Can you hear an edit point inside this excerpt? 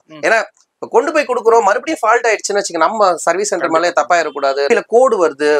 yes; 1 cut; at 4.7 s

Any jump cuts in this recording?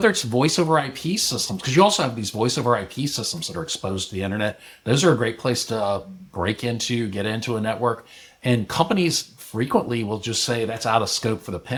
no; 0 cuts

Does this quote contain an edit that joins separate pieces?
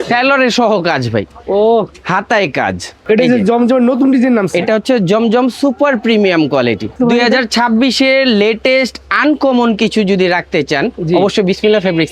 yes; 2 cuts; at 2.9 s, 6.9 s

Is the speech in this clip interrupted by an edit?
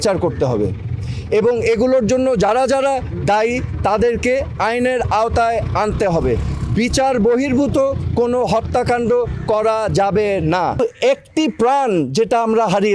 yes; 1 cut; at 10.8 s

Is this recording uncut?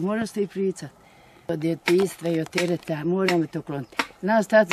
no; 1 cut; at 1.5 s

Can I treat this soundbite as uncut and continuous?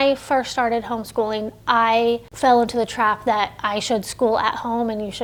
yes; 0 cuts

